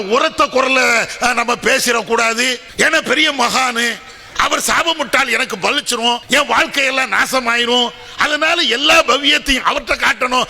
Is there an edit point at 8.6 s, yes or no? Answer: no